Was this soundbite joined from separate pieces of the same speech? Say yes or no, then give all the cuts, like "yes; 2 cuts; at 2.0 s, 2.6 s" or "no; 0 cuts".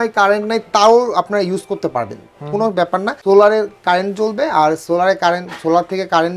no; 0 cuts